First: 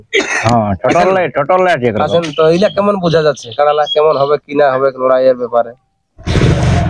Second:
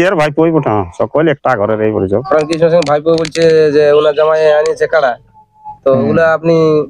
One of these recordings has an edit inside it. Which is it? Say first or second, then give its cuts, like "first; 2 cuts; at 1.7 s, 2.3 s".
second; 1 cut; at 2.2 s